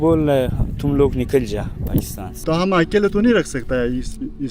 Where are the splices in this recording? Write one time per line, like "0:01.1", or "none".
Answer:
0:02.4

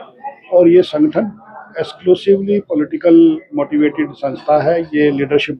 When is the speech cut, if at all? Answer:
none

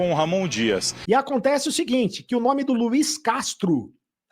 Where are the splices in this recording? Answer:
0:00.9

